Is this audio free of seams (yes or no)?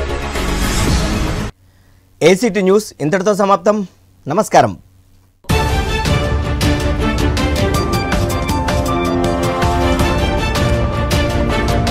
yes